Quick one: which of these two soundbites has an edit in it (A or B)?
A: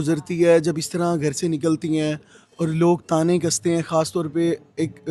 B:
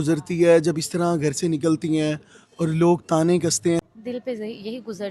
B